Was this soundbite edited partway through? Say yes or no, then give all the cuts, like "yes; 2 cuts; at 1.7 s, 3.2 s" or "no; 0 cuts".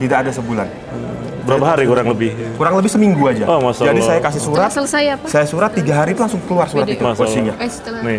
no; 0 cuts